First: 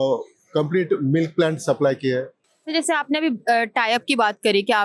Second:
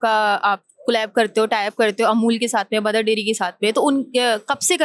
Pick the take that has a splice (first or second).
first